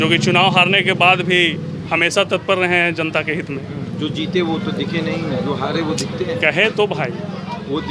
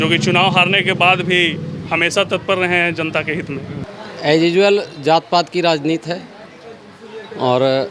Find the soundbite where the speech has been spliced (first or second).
second